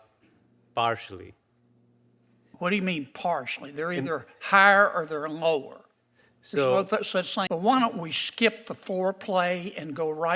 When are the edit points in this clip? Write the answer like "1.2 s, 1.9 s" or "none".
7.5 s